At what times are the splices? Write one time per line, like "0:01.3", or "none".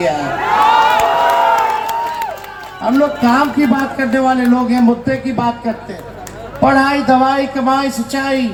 none